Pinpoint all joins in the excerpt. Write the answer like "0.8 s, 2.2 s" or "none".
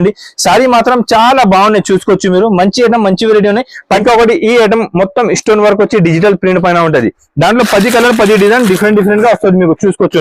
4.0 s